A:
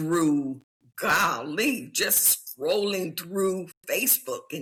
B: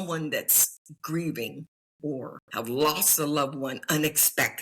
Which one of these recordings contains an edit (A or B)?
B